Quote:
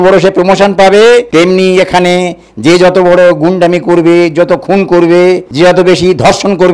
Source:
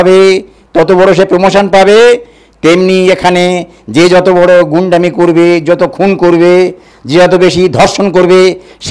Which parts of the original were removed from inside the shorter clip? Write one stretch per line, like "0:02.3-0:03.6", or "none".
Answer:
0:02.2-0:02.6
0:06.8-0:07.0